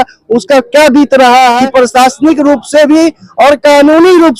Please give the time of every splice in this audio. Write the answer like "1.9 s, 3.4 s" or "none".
1.6 s

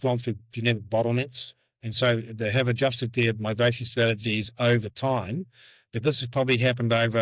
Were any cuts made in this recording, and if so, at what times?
none

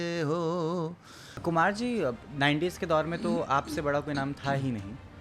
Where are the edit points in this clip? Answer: 1.4 s

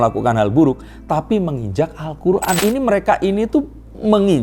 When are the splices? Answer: 2.6 s

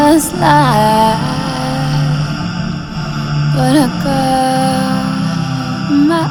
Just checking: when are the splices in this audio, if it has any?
none

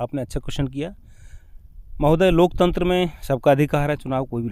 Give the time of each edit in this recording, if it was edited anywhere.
none

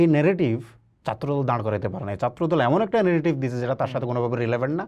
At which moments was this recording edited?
none

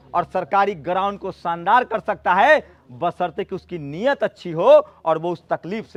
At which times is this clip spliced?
none

